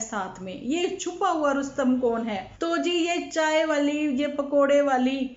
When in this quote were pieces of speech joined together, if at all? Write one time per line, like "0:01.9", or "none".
0:02.6